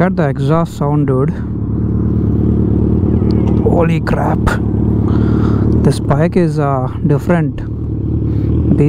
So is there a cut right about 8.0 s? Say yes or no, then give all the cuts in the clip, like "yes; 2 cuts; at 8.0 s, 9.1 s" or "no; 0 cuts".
no; 0 cuts